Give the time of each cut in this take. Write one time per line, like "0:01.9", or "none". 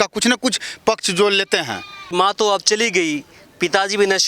0:02.1